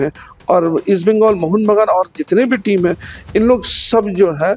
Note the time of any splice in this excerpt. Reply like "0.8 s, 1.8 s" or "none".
none